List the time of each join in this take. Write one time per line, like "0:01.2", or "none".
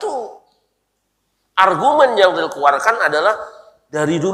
none